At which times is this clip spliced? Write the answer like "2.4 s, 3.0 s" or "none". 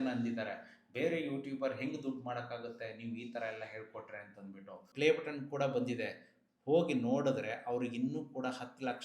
4.9 s